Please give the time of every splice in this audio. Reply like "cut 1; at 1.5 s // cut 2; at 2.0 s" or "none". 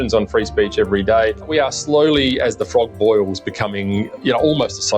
cut 1; at 1.4 s